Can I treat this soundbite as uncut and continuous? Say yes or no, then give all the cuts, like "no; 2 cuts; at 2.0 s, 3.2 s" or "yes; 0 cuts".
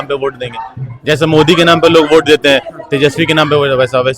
yes; 0 cuts